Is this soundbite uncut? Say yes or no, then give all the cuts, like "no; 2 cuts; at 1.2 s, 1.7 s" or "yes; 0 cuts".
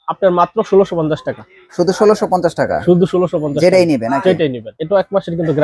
no; 1 cut; at 4.7 s